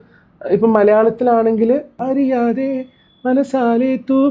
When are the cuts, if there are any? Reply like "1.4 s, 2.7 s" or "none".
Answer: 2.0 s